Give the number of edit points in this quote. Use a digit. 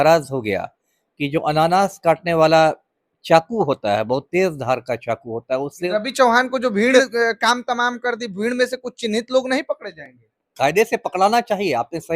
2